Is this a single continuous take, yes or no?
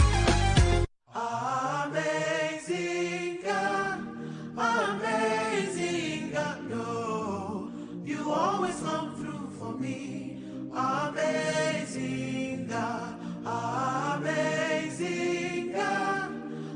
yes